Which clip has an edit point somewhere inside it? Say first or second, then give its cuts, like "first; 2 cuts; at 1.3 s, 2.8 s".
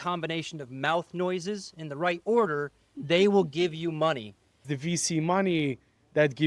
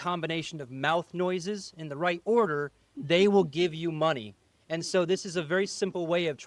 first; 1 cut; at 4.6 s